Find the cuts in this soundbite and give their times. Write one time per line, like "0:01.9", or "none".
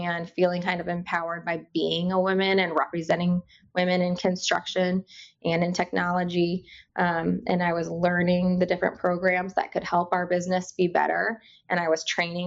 none